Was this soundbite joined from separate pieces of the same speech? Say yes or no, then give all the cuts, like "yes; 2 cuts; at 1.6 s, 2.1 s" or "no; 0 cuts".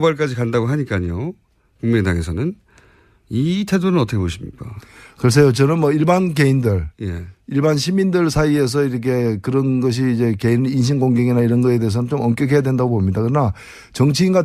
no; 0 cuts